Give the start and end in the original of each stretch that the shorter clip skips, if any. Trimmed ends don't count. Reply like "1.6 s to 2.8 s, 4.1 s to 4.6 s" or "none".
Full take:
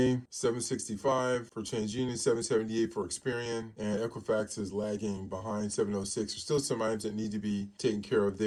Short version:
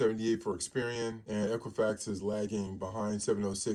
none